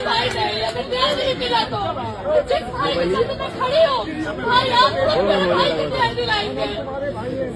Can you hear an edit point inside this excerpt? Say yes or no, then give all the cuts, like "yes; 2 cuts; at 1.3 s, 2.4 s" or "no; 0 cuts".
no; 0 cuts